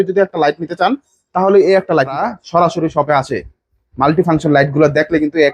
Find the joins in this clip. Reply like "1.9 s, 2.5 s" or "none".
2.2 s